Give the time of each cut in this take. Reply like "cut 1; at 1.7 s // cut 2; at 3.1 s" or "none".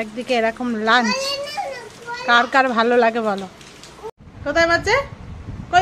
cut 1; at 3.9 s